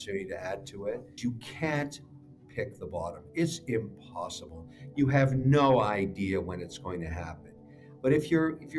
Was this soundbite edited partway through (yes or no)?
yes